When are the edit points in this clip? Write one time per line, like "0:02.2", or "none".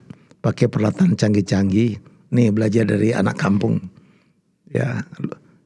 none